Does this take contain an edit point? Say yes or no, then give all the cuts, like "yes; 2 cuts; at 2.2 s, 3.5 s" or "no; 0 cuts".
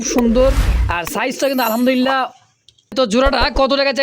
yes; 1 cut; at 2.9 s